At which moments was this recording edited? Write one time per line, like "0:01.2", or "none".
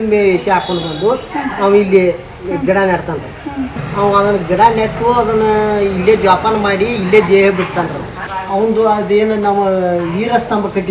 0:03.8
0:08.2